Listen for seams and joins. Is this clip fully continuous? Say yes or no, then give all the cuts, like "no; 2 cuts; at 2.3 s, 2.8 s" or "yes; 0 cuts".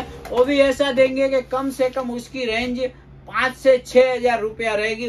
yes; 0 cuts